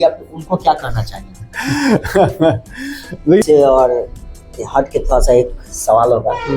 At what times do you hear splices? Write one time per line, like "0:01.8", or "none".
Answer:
0:03.4